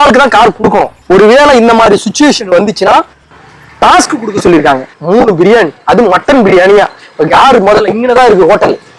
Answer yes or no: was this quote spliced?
yes